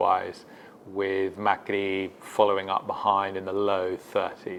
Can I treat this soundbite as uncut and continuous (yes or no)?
yes